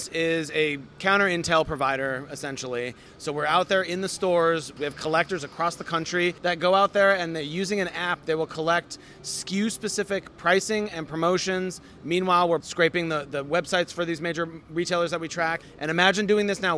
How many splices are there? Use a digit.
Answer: 5